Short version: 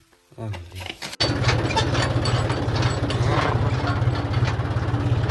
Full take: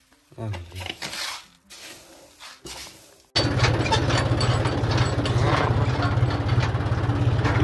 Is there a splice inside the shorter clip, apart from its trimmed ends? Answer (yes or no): yes